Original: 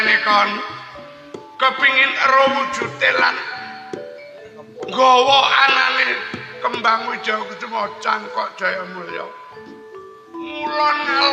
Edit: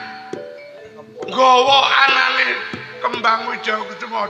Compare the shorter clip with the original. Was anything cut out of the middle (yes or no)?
no